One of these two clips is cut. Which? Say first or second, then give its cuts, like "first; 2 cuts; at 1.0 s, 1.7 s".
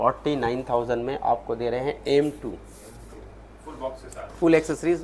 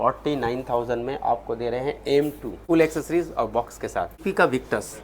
second; 2 cuts; at 2.5 s, 4.2 s